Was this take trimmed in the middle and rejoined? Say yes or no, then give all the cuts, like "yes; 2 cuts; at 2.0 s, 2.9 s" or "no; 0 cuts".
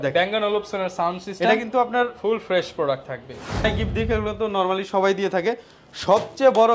yes; 1 cut; at 3.7 s